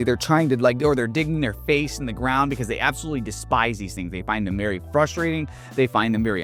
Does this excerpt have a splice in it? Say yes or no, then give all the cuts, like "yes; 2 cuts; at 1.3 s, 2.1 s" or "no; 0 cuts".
no; 0 cuts